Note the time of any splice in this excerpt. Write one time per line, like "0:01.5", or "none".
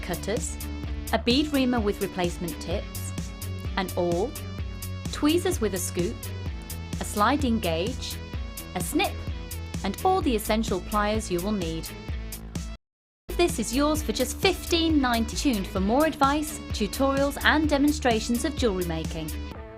0:15.3